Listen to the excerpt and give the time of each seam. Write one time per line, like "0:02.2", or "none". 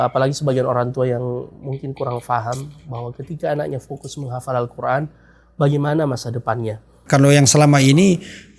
0:07.0